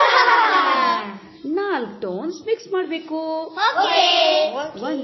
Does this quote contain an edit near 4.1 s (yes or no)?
yes